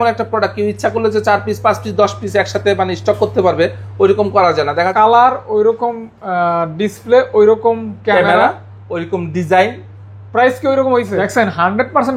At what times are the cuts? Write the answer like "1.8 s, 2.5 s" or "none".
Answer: 4.9 s, 11.2 s